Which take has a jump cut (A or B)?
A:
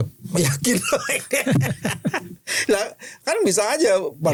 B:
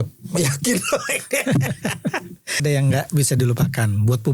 B